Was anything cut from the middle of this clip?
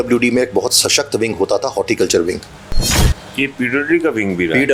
no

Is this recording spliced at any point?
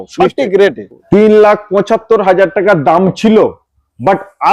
yes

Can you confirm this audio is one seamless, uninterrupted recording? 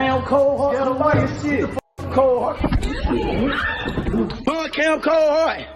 no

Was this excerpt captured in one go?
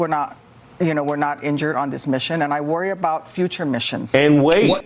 no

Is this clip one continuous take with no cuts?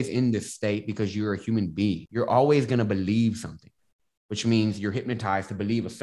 no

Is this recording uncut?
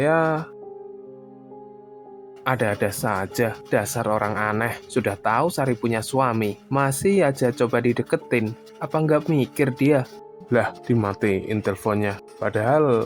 yes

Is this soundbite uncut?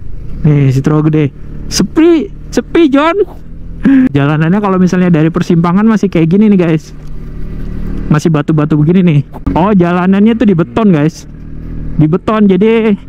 no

